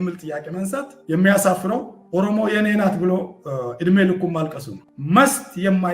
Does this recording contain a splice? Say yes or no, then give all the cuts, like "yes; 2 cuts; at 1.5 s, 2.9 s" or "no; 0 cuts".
yes; 2 cuts; at 0.9 s, 4.8 s